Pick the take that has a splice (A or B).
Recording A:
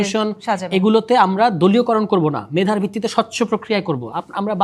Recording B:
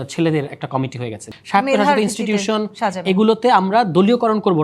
B